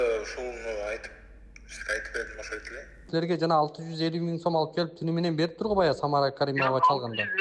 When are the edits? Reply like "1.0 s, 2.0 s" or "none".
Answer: 3.1 s